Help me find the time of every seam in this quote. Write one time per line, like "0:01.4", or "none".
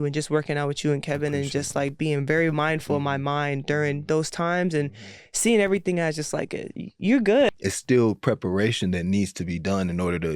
0:07.5